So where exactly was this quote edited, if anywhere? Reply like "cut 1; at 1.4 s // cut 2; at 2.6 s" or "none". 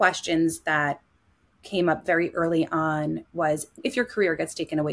cut 1; at 3.8 s